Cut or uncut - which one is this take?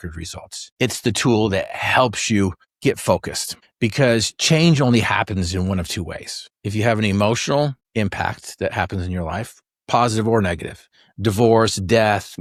uncut